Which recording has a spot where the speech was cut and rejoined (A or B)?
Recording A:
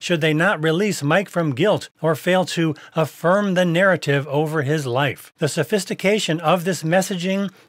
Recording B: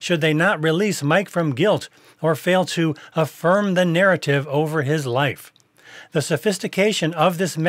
A